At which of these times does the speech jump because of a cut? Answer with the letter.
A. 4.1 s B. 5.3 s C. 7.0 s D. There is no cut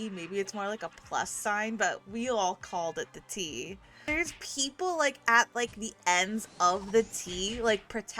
A